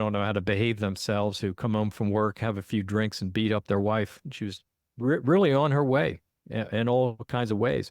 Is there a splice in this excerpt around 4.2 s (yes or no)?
yes